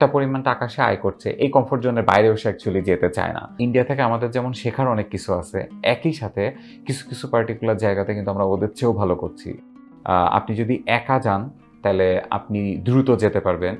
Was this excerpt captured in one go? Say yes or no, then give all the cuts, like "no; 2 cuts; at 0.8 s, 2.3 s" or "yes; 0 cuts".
no; 2 cuts; at 3.5 s, 9.7 s